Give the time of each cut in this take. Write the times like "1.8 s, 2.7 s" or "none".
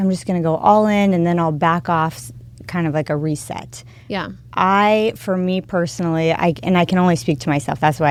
none